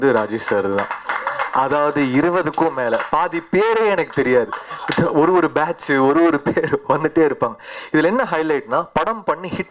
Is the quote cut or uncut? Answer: uncut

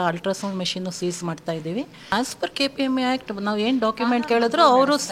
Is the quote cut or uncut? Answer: cut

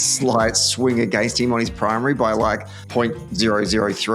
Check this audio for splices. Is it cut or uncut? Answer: cut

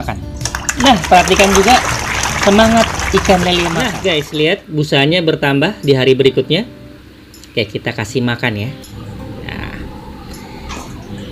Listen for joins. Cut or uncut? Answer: cut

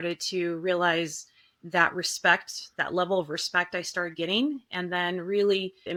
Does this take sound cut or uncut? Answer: uncut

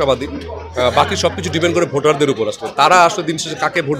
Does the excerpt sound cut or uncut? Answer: uncut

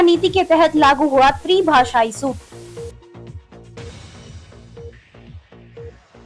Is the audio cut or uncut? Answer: uncut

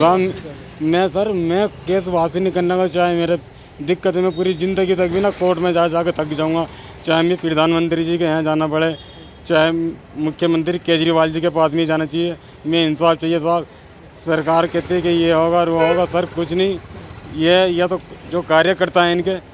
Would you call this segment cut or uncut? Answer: uncut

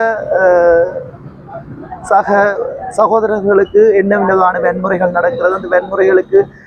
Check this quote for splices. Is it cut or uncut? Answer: uncut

